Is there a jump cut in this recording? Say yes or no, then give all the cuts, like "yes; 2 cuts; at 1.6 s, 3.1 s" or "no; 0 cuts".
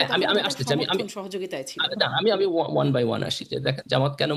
no; 0 cuts